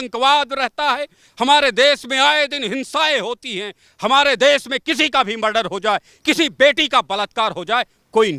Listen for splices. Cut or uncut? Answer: uncut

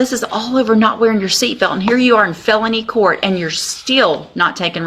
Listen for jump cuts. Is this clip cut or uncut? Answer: uncut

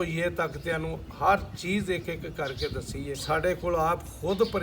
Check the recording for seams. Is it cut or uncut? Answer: cut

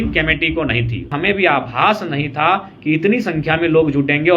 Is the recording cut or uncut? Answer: cut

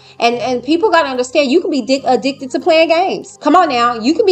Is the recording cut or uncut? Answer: cut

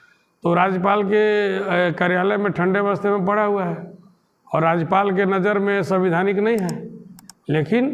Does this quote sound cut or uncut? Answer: uncut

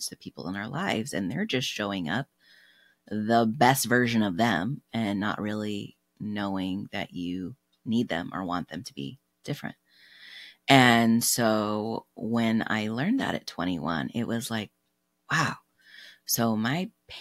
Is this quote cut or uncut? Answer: uncut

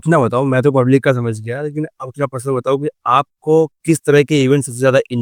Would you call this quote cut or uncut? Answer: uncut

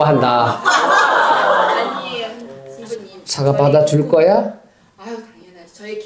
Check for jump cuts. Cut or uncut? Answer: uncut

